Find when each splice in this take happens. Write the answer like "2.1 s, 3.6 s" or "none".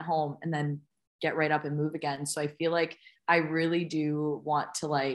3.1 s